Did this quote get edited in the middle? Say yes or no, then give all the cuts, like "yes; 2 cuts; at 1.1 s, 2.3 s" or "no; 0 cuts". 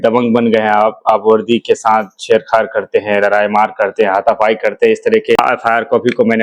yes; 1 cut; at 5.4 s